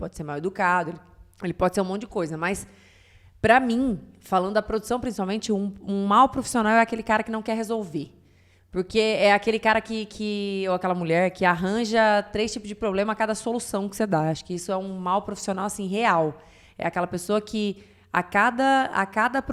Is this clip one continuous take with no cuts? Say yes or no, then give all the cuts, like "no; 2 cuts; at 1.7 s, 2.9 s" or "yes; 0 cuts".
yes; 0 cuts